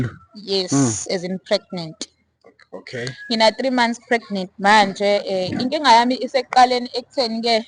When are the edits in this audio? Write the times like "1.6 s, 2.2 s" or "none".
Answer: none